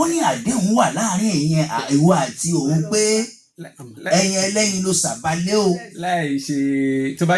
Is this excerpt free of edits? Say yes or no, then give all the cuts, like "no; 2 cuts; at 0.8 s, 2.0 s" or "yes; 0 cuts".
yes; 0 cuts